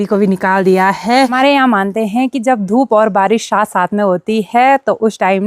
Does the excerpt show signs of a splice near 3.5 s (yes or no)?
no